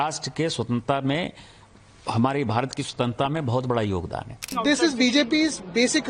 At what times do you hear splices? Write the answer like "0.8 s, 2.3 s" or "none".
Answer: 4.5 s